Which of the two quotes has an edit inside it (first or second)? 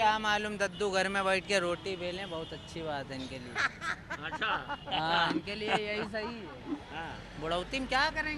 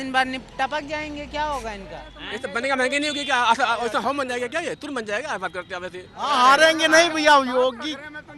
second